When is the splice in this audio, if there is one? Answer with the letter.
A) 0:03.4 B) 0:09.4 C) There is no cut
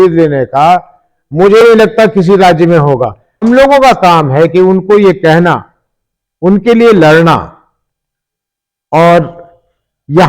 A